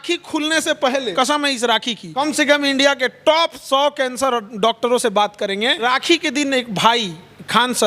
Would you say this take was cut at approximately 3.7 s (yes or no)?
no